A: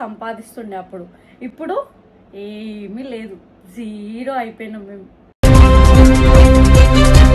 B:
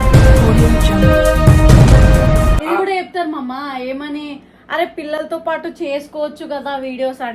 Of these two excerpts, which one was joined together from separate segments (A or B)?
B